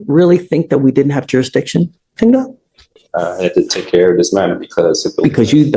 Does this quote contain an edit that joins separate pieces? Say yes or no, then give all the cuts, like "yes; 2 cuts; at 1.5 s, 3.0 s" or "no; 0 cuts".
no; 0 cuts